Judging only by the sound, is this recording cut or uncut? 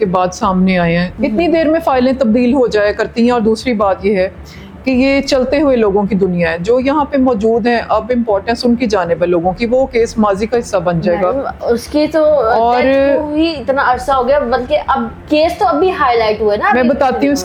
uncut